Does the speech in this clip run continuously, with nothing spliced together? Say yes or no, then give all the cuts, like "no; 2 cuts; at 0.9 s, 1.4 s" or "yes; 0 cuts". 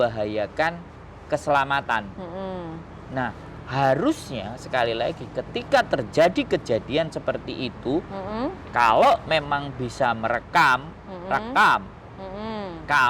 yes; 0 cuts